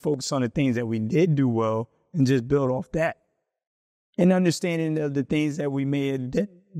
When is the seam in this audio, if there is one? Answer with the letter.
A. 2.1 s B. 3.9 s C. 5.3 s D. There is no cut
D